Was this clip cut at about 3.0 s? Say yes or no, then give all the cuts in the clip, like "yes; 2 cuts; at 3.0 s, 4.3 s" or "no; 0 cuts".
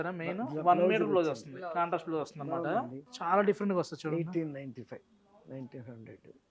yes; 1 cut; at 3.0 s